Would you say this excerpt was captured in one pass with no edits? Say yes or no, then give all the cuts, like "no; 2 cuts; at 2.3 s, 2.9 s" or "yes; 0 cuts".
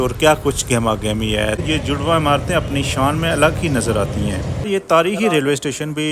no; 2 cuts; at 1.6 s, 4.7 s